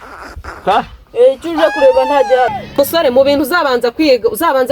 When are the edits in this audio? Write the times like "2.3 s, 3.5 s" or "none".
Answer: 2.6 s